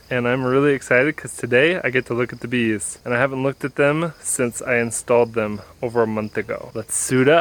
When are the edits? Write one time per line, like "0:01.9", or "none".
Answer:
none